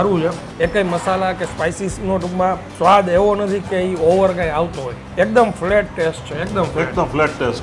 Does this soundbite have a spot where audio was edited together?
yes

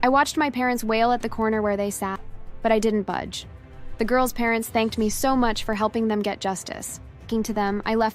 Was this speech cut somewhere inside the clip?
yes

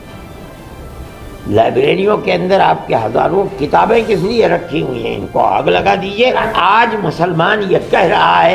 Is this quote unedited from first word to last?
no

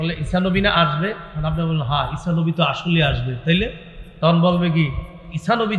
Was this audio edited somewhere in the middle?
no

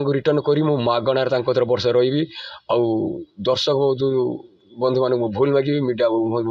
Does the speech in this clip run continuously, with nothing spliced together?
yes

